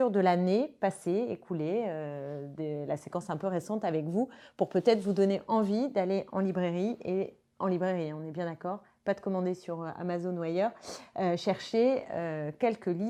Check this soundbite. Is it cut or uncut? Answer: uncut